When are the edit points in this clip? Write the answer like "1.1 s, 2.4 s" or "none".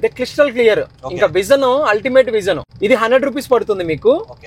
2.7 s